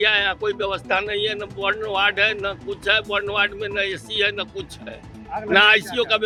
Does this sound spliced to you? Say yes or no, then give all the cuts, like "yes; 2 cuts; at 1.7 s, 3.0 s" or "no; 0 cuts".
no; 0 cuts